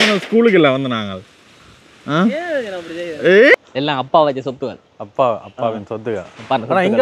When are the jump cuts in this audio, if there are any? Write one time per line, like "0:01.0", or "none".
0:03.5